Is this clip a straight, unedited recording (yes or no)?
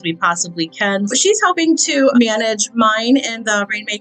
no